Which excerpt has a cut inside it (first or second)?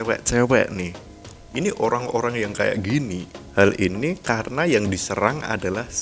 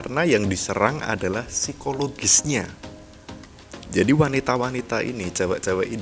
first